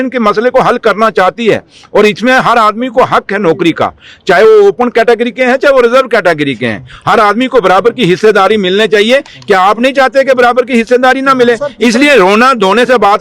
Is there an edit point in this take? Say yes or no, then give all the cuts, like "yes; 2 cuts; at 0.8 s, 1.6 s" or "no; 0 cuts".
no; 0 cuts